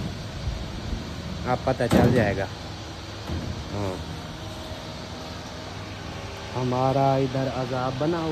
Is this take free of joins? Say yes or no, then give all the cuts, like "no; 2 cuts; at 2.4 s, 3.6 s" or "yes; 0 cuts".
yes; 0 cuts